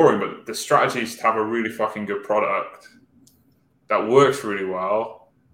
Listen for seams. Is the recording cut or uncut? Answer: uncut